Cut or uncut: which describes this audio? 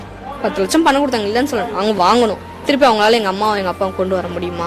cut